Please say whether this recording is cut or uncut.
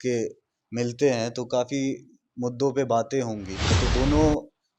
cut